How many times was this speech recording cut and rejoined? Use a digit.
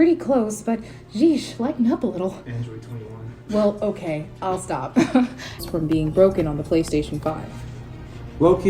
1